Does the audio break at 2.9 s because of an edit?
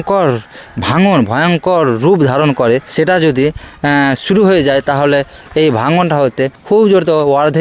yes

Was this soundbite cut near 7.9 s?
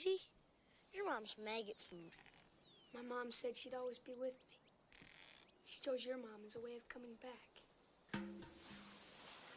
yes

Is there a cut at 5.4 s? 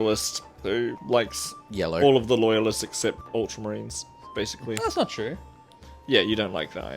no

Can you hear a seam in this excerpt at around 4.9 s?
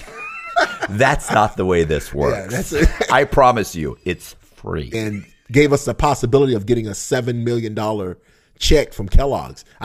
yes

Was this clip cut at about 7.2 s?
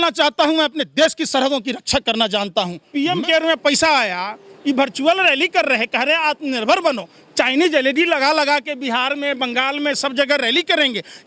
no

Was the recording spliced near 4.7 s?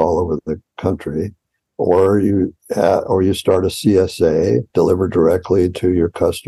yes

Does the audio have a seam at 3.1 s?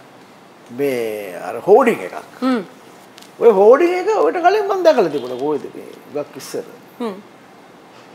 no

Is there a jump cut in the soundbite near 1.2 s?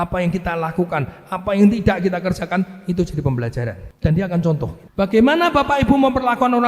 no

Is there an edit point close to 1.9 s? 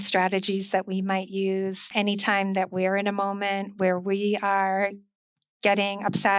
yes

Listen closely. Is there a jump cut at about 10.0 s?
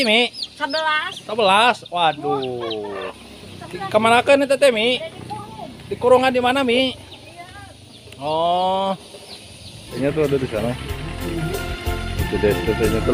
yes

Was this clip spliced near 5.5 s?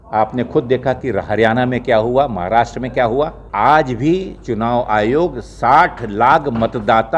no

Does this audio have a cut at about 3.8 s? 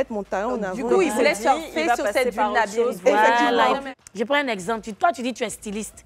yes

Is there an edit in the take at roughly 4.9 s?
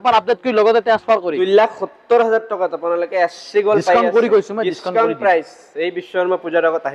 no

